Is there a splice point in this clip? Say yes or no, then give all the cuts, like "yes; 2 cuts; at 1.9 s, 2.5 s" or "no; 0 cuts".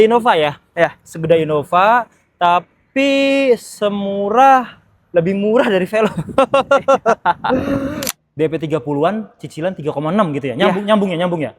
yes; 1 cut; at 8.1 s